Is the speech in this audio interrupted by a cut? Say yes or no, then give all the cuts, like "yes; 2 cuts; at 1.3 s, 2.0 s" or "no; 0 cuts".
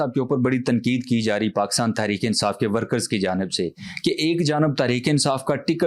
no; 0 cuts